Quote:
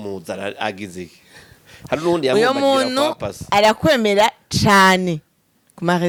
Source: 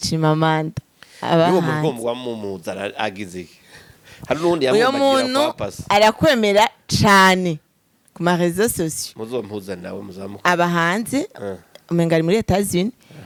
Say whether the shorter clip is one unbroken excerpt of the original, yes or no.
yes